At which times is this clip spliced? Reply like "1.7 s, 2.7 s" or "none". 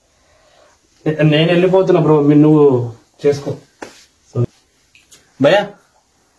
4.3 s